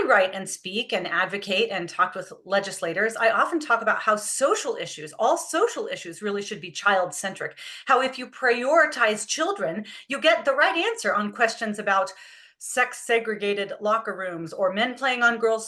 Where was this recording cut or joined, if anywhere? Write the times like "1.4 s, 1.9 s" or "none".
none